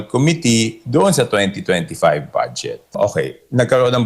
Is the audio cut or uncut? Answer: cut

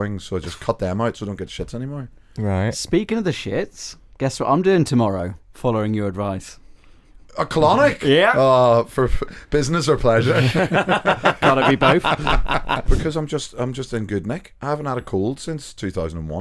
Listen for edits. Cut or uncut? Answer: cut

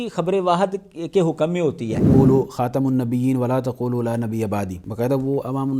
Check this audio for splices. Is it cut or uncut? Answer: cut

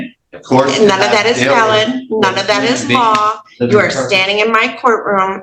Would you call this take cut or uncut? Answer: uncut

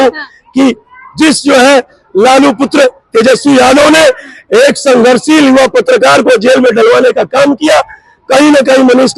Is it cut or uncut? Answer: uncut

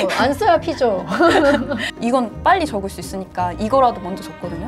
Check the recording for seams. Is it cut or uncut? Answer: cut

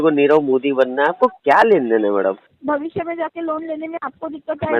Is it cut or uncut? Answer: cut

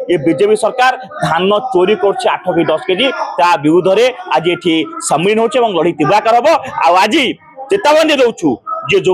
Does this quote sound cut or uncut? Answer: uncut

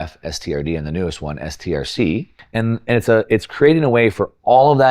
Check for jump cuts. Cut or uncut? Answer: cut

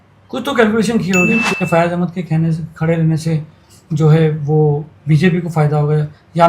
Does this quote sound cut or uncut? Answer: cut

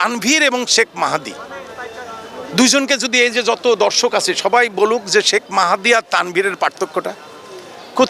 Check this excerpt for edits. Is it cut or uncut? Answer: uncut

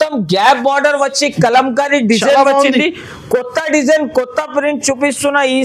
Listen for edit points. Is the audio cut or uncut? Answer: uncut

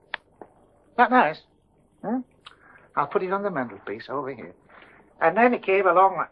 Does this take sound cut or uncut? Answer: uncut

